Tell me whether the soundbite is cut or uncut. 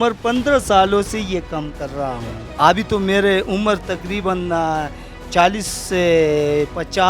cut